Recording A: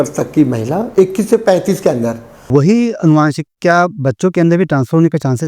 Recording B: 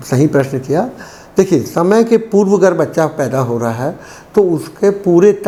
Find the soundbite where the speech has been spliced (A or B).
A